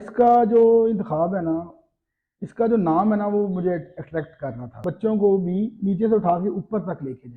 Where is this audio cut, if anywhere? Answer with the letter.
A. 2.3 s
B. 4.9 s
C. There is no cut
B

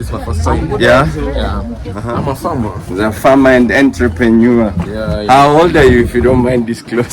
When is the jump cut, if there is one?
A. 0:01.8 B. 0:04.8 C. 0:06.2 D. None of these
A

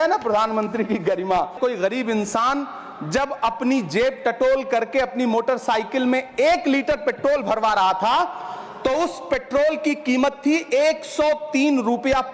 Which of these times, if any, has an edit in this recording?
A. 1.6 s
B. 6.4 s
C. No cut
A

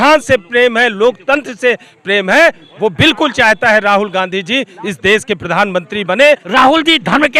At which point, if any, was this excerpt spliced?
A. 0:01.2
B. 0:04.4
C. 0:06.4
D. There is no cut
C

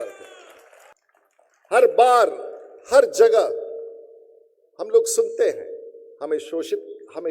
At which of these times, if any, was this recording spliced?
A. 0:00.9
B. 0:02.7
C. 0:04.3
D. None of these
A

